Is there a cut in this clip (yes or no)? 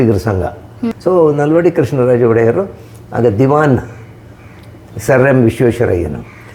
yes